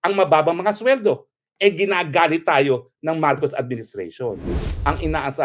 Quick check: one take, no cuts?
no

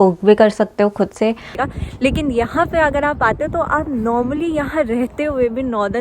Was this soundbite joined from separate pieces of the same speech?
yes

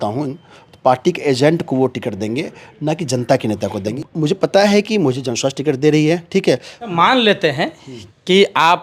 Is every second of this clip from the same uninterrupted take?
no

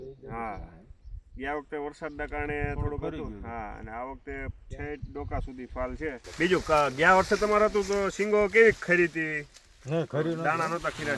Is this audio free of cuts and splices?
no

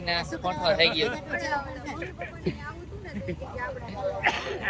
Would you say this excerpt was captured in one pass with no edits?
yes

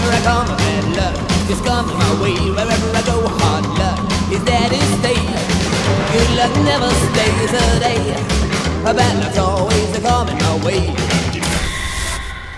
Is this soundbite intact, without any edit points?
yes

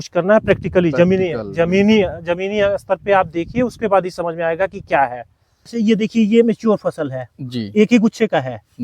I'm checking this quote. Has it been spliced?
yes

